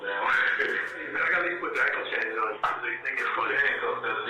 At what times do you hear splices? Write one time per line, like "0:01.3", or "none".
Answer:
0:01.1